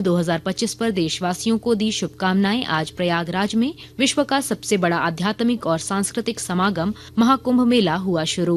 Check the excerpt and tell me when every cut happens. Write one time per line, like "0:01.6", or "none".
0:03.8
0:07.0